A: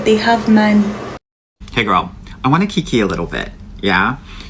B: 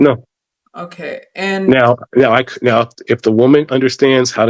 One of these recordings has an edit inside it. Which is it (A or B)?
A